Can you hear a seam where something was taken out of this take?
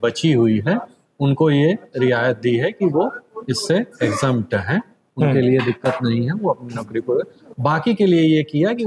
no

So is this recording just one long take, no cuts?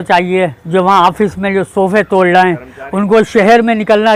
yes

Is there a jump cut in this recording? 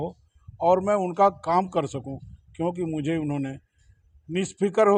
no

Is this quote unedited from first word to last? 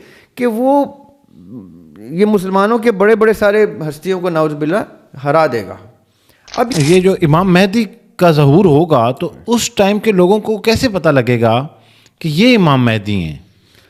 no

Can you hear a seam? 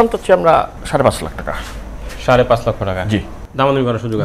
no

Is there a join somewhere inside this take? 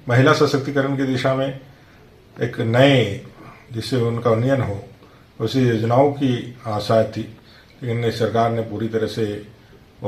no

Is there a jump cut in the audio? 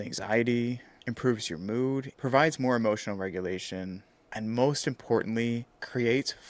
yes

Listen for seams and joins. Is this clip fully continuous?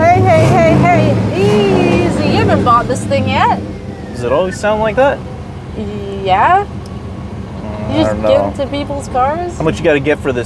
yes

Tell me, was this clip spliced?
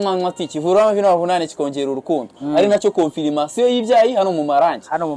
no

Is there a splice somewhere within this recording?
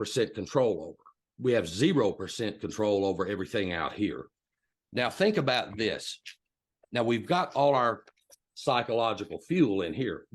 yes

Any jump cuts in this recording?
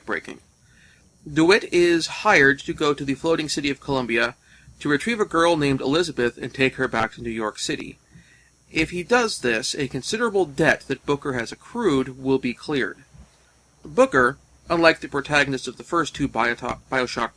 yes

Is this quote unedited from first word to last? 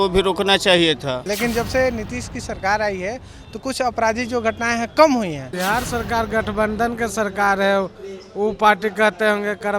no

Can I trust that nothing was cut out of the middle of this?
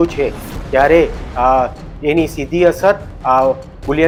yes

